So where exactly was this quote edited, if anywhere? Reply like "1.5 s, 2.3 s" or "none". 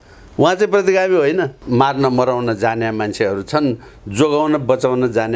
1.6 s